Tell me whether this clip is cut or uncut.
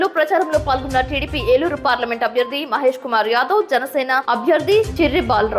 uncut